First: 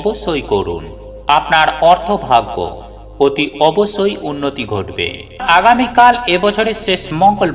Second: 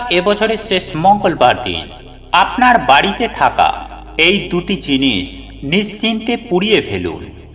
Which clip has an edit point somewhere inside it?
first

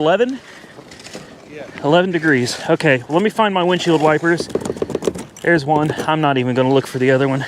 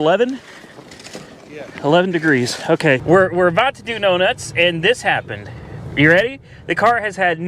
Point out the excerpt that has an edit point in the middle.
second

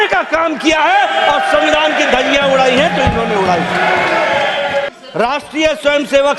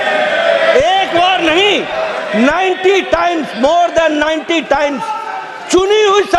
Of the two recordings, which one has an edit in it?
first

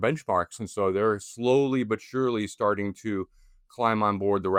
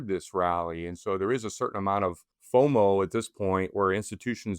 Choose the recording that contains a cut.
second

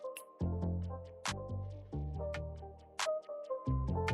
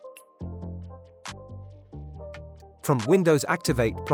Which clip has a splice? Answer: first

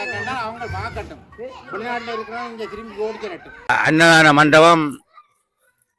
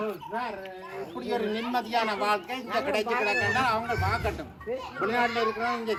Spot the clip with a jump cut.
first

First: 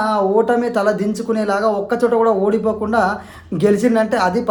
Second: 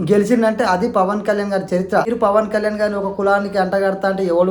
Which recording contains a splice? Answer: second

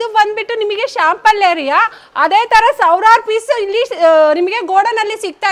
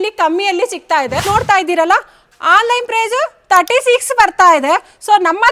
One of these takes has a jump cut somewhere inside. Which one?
second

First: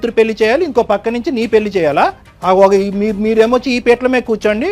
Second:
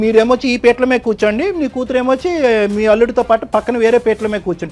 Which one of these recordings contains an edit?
first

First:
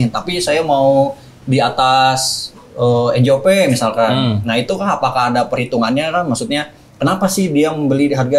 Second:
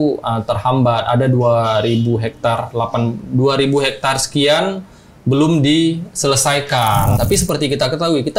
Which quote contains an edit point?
second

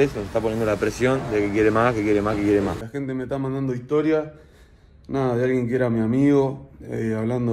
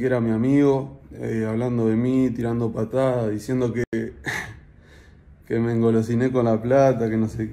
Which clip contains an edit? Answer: first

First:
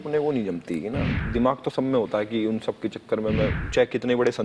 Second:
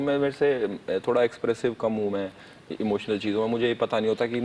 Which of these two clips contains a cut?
first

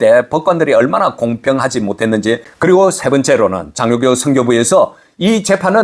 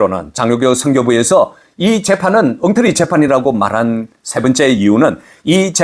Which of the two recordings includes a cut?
first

